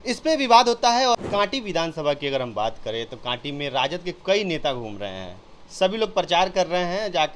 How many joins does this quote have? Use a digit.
1